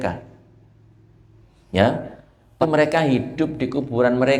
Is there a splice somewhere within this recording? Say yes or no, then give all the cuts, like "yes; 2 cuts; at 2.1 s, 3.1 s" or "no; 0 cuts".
yes; 1 cut; at 2.6 s